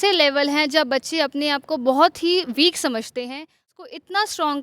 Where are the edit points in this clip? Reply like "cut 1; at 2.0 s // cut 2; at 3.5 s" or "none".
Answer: cut 1; at 3.7 s

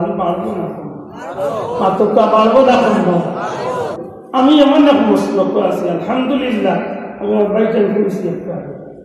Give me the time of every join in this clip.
cut 1; at 3.9 s

